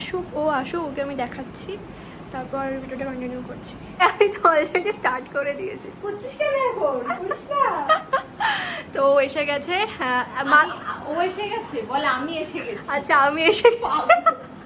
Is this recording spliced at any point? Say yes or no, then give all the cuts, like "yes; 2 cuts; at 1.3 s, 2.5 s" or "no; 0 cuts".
no; 0 cuts